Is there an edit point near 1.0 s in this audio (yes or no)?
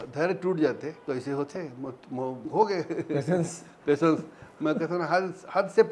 yes